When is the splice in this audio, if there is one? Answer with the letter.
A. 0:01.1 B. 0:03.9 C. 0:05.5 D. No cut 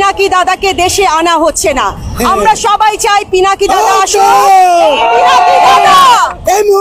D